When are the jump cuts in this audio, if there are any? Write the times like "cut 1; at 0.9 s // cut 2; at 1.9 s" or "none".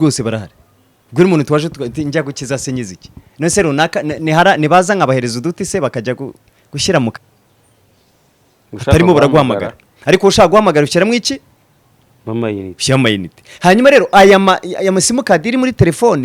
cut 1; at 7.2 s